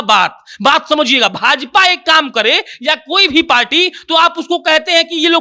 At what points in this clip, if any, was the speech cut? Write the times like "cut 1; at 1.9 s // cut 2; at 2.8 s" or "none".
none

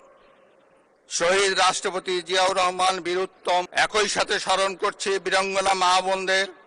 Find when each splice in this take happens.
cut 1; at 3.7 s

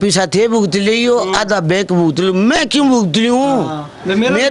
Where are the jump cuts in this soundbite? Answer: none

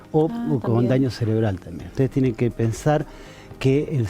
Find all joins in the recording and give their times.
cut 1; at 1.8 s

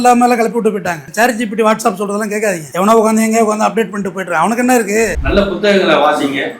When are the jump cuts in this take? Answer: cut 1; at 5.2 s

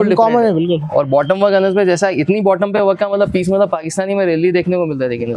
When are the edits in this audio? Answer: none

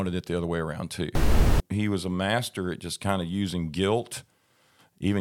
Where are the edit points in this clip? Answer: cut 1; at 1.4 s

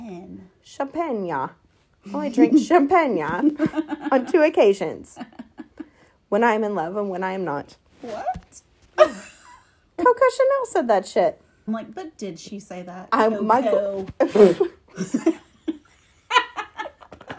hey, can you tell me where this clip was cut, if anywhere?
cut 1; at 11.7 s

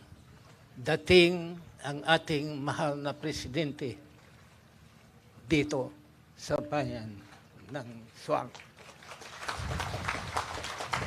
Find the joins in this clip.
cut 1; at 5.7 s

